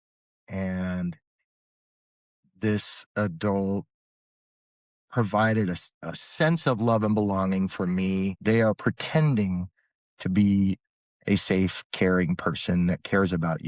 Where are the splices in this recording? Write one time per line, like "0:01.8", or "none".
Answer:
0:08.4